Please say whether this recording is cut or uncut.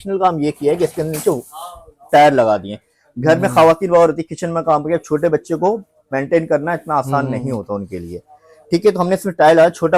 uncut